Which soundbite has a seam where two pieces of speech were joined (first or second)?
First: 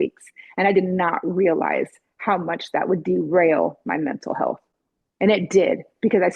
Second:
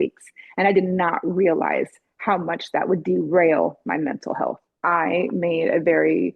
second